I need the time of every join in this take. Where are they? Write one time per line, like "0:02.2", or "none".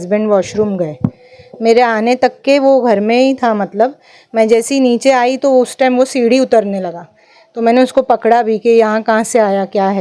none